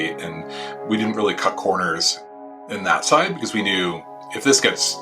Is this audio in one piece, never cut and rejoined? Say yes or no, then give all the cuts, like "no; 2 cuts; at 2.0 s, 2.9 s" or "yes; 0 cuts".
no; 1 cut; at 2.6 s